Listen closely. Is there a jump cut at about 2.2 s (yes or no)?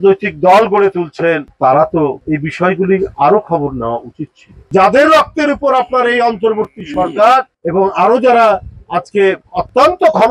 no